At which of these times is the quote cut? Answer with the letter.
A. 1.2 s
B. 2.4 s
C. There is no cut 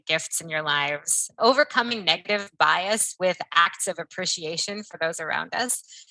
A